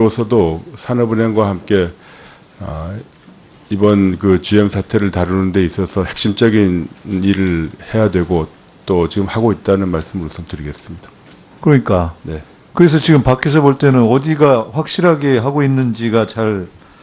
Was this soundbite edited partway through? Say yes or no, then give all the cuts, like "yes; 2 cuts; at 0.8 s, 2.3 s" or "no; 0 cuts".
yes; 1 cut; at 12.4 s